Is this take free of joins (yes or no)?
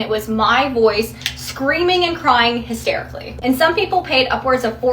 no